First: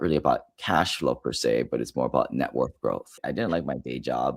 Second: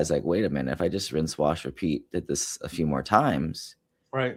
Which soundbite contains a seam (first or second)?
first